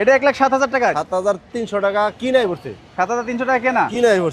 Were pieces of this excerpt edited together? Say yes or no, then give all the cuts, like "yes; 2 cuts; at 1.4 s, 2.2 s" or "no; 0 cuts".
no; 0 cuts